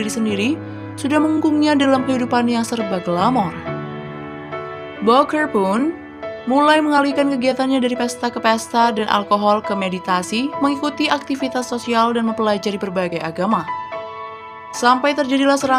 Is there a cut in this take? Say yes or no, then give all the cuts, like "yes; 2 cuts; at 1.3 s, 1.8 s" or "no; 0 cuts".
yes; 2 cuts; at 3.6 s, 5.0 s